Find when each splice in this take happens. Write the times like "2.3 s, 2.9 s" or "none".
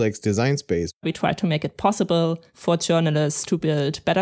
1.0 s, 2.5 s